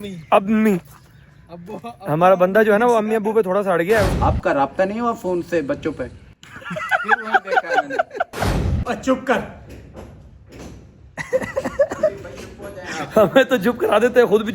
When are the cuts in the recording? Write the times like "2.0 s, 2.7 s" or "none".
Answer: 4.1 s, 8.4 s